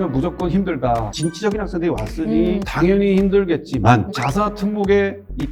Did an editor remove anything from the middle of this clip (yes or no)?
yes